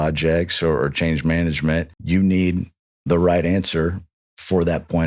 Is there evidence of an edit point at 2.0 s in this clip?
yes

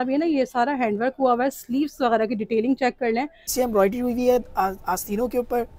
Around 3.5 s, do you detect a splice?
yes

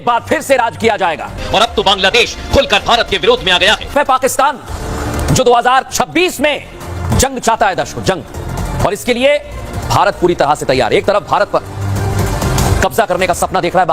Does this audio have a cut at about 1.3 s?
yes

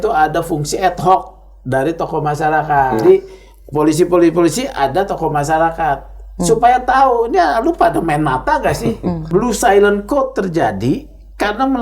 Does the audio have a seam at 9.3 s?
yes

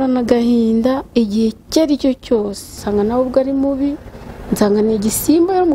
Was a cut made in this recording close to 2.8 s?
yes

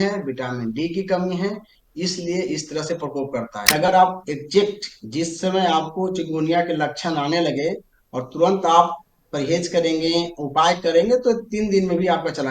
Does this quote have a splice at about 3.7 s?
yes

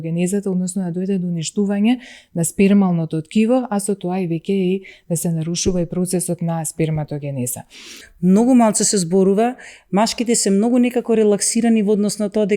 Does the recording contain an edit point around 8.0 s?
yes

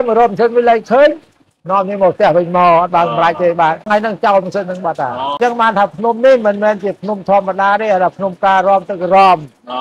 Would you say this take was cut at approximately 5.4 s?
yes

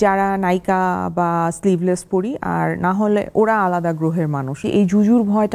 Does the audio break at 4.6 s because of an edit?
yes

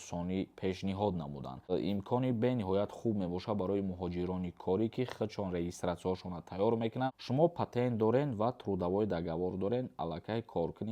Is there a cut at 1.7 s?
yes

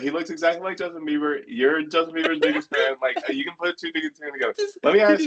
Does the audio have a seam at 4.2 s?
no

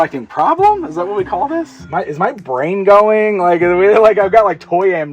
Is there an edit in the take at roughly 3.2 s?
no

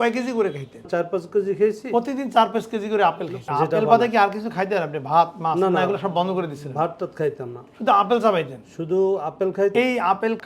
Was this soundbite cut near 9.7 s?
yes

